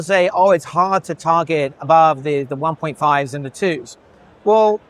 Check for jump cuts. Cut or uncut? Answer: uncut